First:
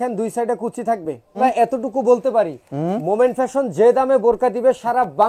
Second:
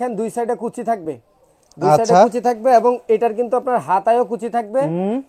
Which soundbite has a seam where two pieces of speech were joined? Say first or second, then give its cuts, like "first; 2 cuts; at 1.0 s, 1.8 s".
first; 1 cut; at 1.4 s